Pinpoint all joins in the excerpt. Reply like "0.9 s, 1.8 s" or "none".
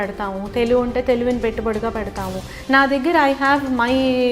2.5 s